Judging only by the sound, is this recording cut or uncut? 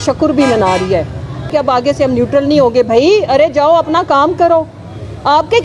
cut